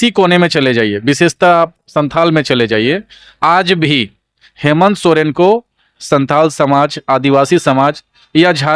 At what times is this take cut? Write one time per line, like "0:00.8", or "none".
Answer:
none